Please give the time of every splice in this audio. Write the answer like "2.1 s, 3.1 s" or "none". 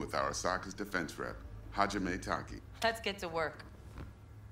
2.5 s

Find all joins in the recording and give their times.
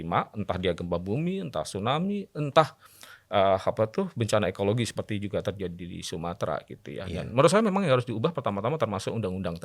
none

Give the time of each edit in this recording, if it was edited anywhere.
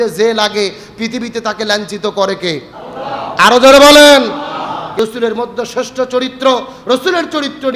4.9 s

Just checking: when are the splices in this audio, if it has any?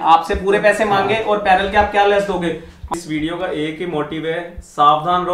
2.9 s

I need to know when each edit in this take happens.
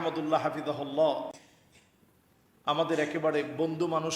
none

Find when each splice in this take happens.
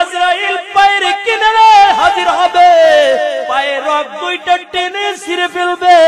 3.5 s

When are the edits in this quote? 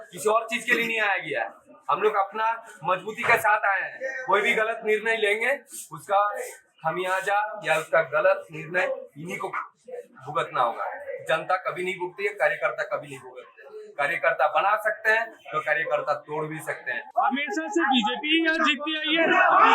17.1 s

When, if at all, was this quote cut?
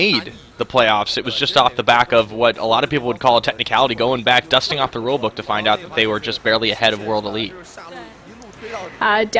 4.9 s

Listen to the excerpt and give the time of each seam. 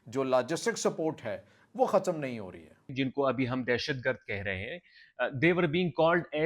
2.9 s

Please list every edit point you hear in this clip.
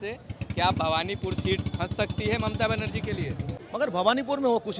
3.5 s

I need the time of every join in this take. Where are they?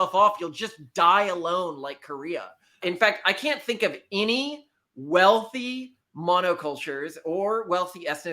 2.6 s

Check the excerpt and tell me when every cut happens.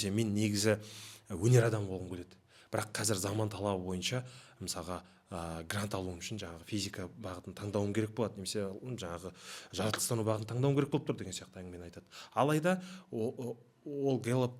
none

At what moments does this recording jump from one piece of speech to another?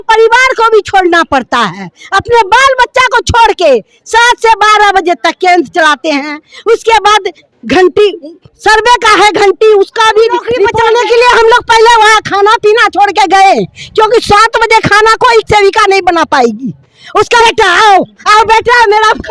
10.7 s, 17.4 s

